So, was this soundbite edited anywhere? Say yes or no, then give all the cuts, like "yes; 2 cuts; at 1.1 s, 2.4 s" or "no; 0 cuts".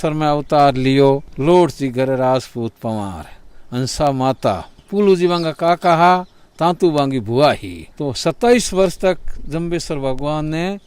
no; 0 cuts